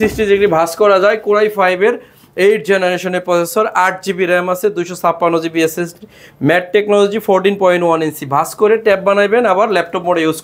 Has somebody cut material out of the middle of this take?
no; 0 cuts

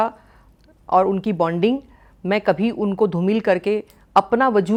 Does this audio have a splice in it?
no; 0 cuts

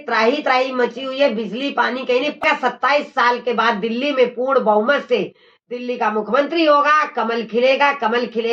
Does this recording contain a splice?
yes; 1 cut; at 2.4 s

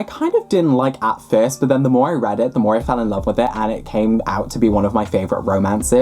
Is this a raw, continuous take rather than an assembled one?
yes; 0 cuts

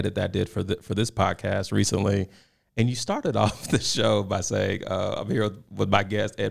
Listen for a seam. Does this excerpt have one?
no; 0 cuts

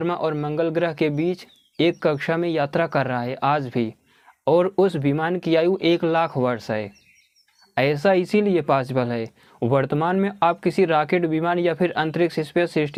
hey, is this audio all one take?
yes; 0 cuts

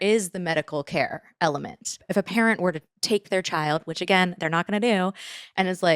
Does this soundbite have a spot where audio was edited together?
yes; 1 cut; at 2.1 s

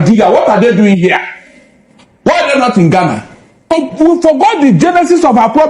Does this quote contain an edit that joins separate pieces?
yes; 1 cut; at 3.7 s

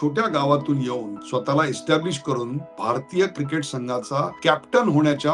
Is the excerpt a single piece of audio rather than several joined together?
no; 3 cuts; at 1.2 s, 2.7 s, 4.3 s

